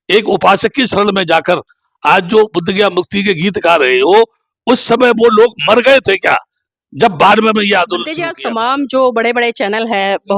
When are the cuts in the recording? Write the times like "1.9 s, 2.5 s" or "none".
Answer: 8.3 s